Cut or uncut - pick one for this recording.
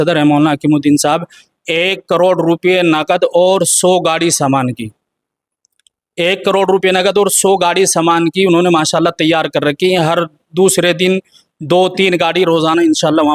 uncut